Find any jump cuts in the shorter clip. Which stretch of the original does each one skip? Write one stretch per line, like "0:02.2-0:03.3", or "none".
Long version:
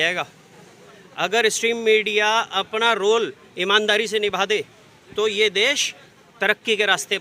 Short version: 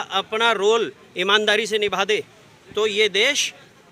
none